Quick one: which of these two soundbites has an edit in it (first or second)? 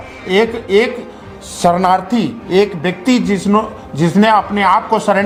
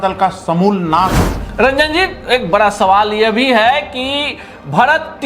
second